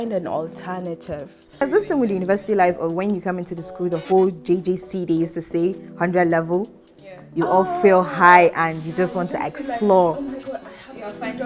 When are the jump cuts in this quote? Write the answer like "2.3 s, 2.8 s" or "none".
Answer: 1.6 s

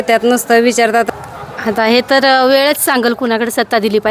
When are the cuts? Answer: 1.1 s, 3.0 s

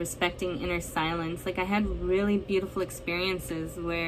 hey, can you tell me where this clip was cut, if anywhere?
none

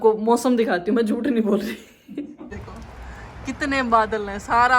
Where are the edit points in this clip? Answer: 2.5 s

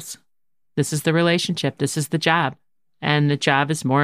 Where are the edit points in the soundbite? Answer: none

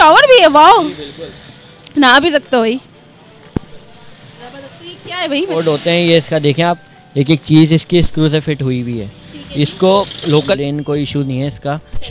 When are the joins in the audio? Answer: 5.5 s, 10.5 s

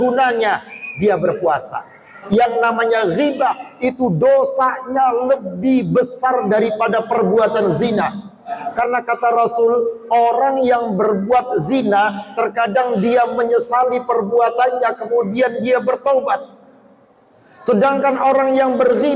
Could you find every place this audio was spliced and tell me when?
2.1 s, 8.6 s

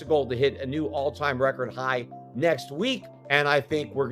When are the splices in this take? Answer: 3.1 s

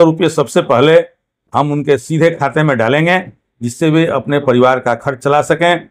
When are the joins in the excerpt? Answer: none

